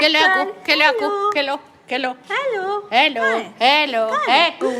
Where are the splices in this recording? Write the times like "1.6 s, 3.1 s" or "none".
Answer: none